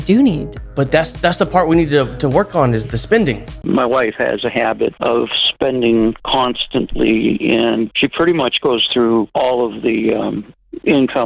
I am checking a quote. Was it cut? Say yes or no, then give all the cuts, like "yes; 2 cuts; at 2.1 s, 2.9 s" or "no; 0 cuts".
yes; 1 cut; at 3.5 s